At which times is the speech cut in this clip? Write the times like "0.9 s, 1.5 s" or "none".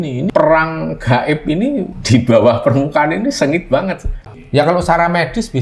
4.3 s

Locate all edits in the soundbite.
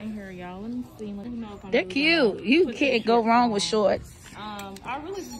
1.2 s

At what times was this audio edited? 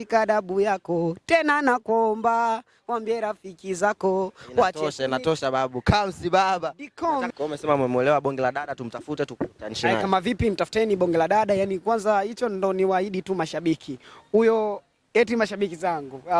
7.3 s

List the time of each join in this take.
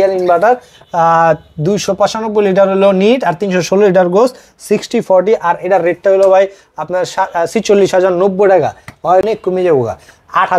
9.2 s

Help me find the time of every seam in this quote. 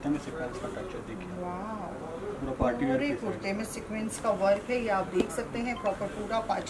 none

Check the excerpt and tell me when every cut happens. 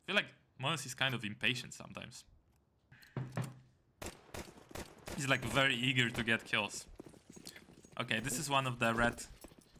none

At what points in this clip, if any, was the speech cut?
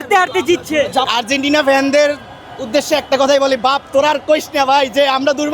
1.1 s

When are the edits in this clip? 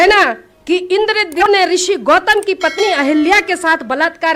1.4 s

